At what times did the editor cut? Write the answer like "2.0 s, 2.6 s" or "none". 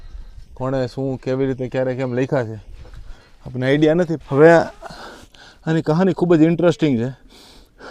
4.2 s